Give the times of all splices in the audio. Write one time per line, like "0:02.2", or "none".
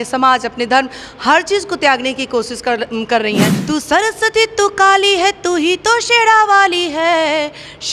0:03.6